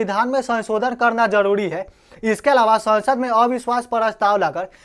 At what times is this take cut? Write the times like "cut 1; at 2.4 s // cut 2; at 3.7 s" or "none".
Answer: none